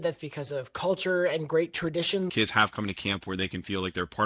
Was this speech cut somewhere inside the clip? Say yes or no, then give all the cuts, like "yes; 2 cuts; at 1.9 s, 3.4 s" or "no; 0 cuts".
yes; 1 cut; at 2.3 s